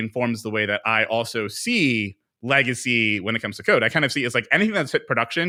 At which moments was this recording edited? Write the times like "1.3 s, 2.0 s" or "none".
none